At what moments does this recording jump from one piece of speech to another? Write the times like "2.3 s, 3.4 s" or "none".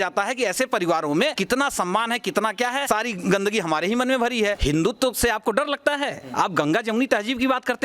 1.4 s, 2.9 s, 4.6 s

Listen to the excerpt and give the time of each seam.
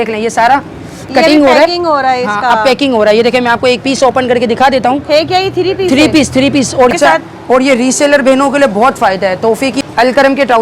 6.9 s, 9.8 s

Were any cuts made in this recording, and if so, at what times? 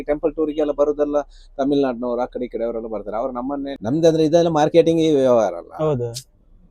3.7 s

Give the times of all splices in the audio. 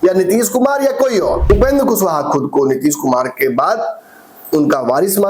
1.4 s

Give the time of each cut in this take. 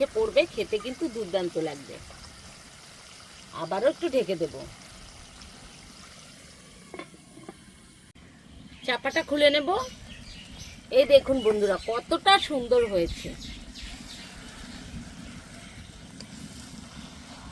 none

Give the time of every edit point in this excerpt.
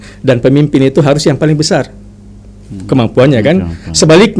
none

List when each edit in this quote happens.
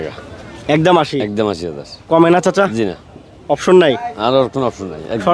none

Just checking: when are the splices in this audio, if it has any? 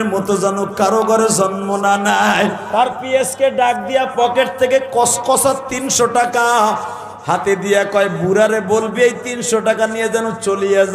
2.6 s

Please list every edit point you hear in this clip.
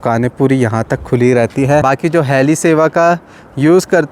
1.8 s

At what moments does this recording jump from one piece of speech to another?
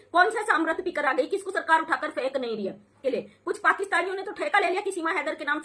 2.9 s

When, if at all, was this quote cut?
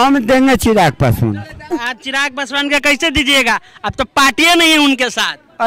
1.7 s

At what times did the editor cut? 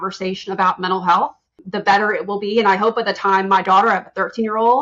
1.6 s

